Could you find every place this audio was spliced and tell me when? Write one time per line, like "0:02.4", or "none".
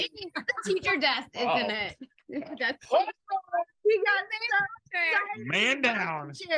0:03.7